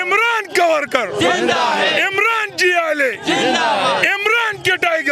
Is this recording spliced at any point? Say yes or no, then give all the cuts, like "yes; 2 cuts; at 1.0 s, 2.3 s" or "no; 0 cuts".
no; 0 cuts